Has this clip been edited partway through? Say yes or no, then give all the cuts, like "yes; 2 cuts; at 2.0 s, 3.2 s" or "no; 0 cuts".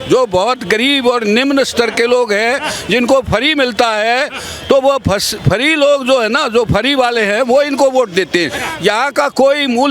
yes; 1 cut; at 8.6 s